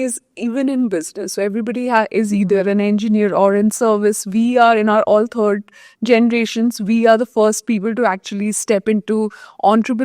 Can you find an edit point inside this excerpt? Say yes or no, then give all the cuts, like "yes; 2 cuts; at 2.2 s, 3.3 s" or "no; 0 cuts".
no; 0 cuts